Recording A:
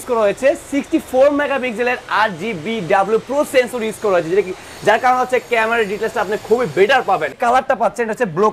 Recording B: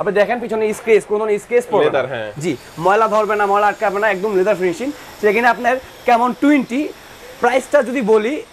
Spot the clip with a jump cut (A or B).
A